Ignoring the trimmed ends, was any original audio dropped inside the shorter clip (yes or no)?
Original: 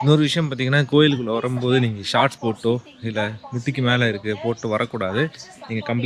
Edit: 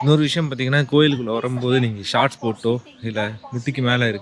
no